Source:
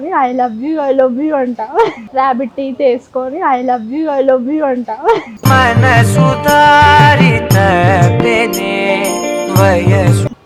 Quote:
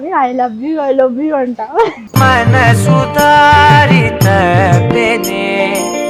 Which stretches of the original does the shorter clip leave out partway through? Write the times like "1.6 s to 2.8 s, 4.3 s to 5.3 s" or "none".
2.0 s to 5.3 s